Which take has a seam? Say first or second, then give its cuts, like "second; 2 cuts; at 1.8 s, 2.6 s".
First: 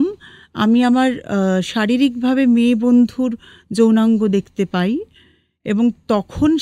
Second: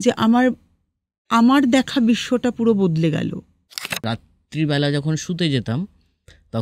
second; 1 cut; at 4.0 s